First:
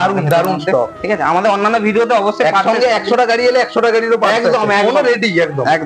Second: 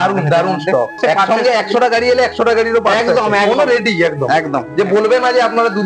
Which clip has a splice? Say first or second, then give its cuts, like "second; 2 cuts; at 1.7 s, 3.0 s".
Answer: second; 1 cut; at 1.0 s